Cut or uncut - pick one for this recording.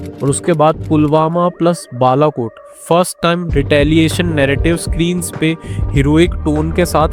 uncut